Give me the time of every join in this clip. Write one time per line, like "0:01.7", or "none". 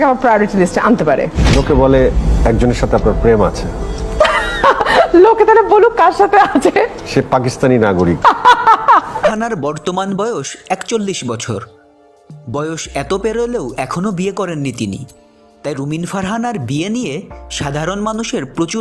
0:09.3